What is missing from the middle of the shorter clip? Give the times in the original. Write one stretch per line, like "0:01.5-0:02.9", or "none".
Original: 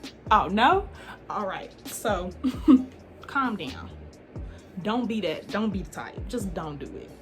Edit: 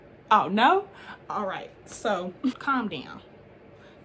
0:02.6-0:03.3